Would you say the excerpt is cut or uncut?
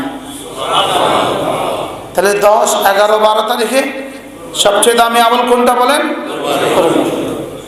uncut